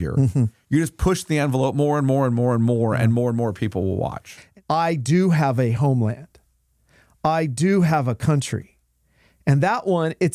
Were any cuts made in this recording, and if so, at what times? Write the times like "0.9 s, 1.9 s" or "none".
4.3 s